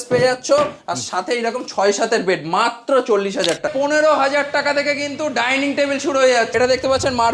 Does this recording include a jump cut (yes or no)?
yes